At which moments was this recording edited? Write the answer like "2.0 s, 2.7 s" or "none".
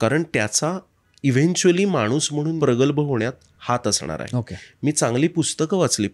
2.5 s